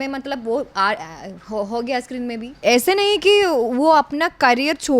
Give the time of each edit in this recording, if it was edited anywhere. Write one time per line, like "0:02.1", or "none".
0:02.4